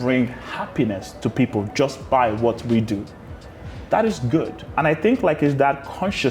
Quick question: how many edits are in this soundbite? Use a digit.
1